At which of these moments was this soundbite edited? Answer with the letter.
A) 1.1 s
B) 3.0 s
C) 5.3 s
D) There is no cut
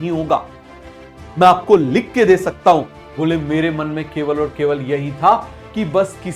B